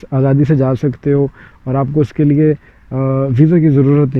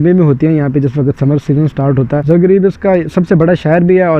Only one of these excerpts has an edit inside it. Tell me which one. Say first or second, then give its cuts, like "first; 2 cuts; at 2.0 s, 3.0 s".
second; 1 cut; at 2.2 s